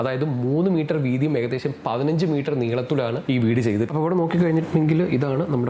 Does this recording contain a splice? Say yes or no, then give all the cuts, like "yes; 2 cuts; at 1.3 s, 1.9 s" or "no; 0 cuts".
yes; 1 cut; at 3.9 s